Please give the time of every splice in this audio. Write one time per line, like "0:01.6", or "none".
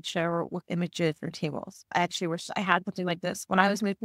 0:01.9